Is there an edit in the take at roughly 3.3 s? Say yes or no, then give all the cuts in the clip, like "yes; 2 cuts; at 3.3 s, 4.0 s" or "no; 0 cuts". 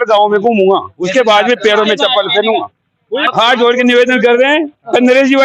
yes; 1 cut; at 3.3 s